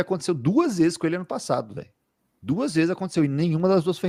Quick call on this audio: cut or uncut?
uncut